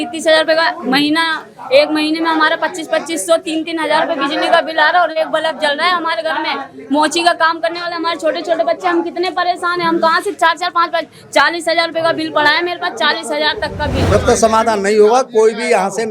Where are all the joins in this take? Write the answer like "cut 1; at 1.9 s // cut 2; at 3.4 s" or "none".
cut 1; at 14.0 s

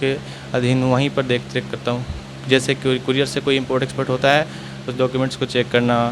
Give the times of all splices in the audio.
none

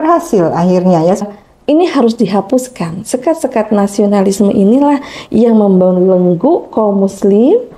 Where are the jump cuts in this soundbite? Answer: cut 1; at 1.3 s

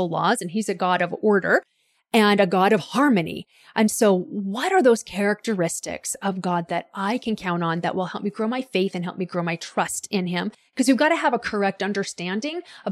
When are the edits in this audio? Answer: none

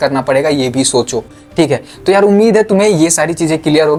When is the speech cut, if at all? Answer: none

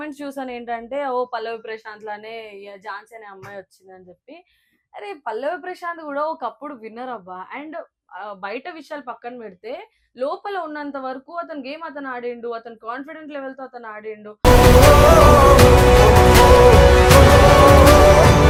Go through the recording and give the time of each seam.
none

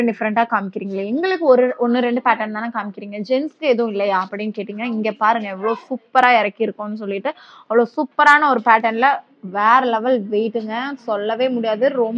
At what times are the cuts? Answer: none

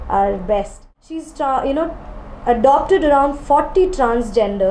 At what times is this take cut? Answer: cut 1; at 1.3 s

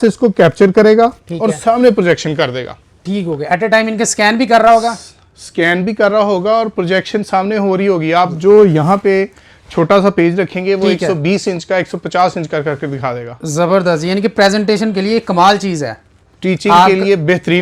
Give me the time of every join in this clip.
none

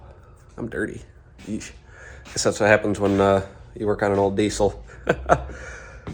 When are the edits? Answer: none

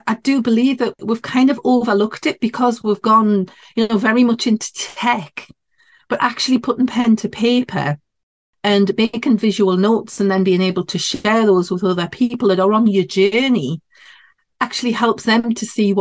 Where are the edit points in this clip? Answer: cut 1; at 1.0 s

